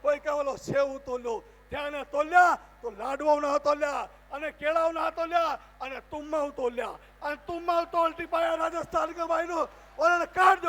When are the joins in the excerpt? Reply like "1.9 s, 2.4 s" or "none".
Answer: none